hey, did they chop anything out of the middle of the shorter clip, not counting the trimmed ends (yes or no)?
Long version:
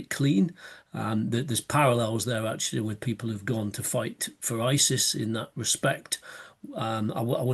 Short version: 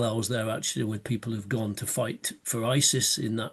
no